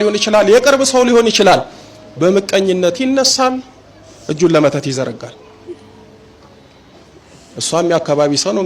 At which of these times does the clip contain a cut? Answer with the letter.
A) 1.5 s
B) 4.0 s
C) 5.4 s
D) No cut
D